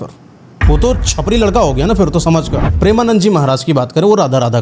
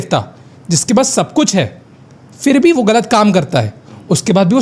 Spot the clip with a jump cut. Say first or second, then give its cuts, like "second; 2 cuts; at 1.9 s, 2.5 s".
first; 1 cut; at 2.6 s